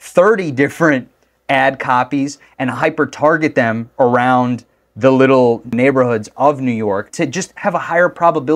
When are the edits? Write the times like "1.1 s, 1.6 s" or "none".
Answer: 5.7 s, 7.1 s